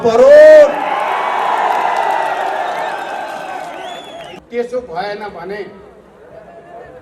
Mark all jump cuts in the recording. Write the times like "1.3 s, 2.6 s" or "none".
4.3 s